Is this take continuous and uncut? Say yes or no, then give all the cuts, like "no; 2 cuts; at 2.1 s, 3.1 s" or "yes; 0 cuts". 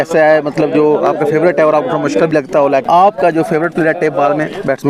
no; 1 cut; at 2.8 s